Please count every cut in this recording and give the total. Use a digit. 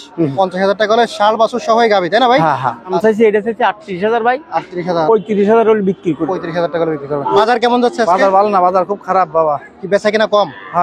2